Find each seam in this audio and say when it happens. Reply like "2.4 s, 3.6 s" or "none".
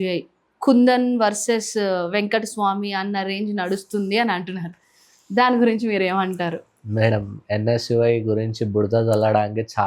none